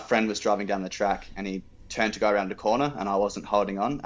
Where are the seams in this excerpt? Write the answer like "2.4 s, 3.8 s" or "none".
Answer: none